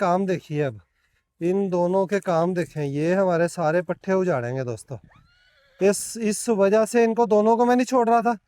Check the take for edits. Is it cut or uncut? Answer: uncut